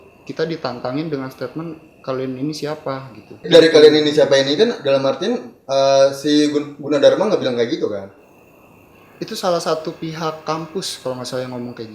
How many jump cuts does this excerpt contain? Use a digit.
1